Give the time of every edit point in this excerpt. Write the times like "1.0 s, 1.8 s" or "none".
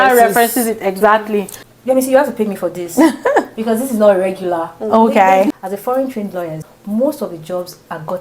1.7 s, 5.5 s, 6.7 s